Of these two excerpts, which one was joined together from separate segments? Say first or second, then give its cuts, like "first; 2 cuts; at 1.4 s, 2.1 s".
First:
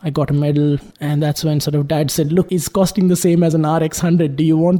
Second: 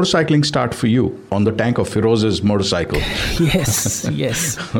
first; 2 cuts; at 0.9 s, 2.5 s